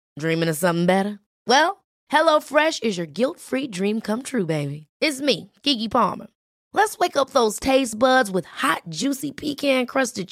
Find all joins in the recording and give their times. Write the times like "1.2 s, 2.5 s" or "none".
none